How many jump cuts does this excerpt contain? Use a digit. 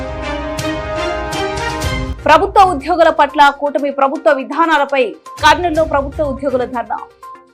0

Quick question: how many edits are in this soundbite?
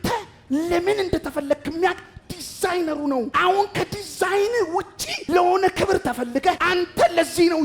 0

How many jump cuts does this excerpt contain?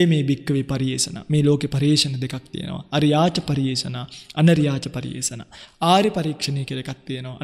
0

